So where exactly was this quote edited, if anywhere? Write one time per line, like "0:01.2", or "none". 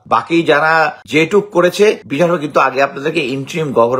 0:01.0
0:02.1